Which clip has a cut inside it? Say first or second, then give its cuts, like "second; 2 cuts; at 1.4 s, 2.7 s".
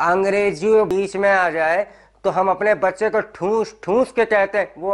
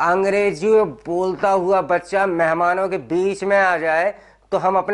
first; 1 cut; at 0.9 s